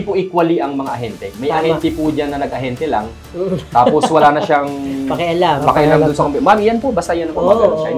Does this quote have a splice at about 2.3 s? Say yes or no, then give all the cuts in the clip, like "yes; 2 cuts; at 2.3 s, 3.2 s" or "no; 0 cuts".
no; 0 cuts